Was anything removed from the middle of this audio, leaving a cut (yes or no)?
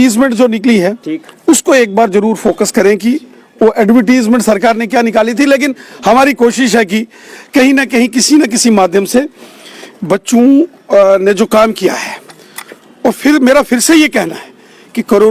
no